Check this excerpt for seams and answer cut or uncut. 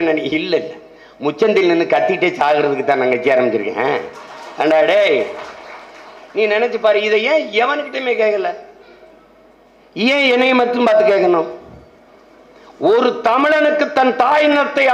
uncut